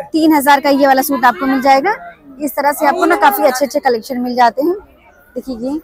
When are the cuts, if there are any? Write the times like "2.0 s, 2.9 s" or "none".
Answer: none